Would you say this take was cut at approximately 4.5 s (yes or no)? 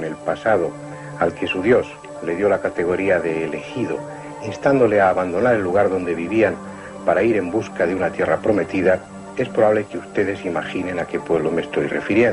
yes